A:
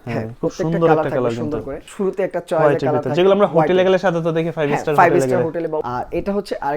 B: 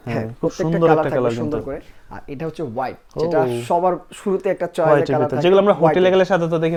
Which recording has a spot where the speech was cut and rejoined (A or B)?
A